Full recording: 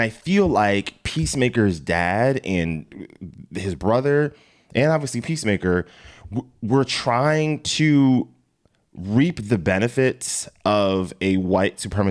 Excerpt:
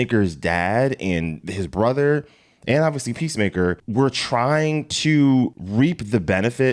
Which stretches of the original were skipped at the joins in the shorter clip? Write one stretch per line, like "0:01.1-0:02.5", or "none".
0:02.9-0:03.5
0:05.9-0:06.6
0:08.4-0:09.0